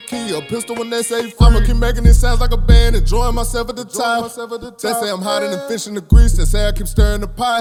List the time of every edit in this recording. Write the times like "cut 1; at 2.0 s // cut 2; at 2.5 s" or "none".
none